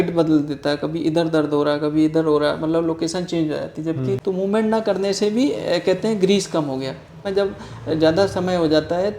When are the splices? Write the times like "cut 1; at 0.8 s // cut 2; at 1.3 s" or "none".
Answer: cut 1; at 4.2 s // cut 2; at 7.3 s